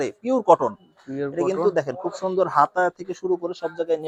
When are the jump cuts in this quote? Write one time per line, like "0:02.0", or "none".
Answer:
none